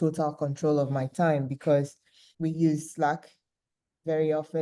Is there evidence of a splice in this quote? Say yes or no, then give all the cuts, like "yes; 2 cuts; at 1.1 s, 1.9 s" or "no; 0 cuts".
yes; 1 cut; at 1.8 s